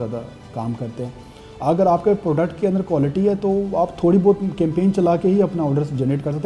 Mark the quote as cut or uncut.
uncut